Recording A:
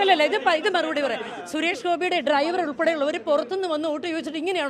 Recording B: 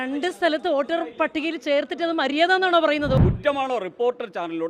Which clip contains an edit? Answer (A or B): B